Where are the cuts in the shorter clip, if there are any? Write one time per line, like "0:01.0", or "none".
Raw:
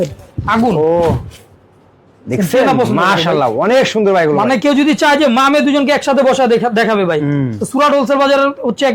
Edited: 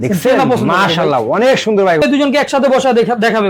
0:02.0

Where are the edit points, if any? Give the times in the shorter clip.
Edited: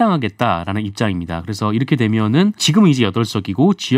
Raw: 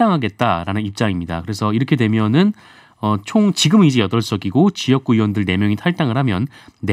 0:02.6

